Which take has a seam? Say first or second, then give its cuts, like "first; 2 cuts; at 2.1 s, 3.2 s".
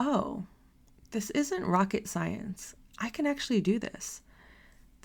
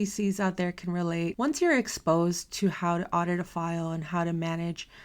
second; 1 cut; at 1.3 s